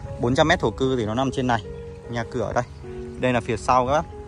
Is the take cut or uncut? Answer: uncut